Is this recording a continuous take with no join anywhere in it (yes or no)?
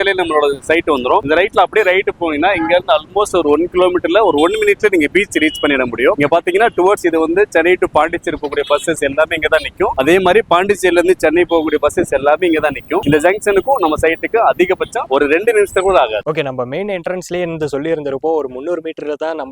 yes